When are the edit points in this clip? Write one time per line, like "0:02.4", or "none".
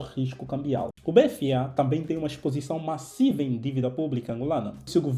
0:00.9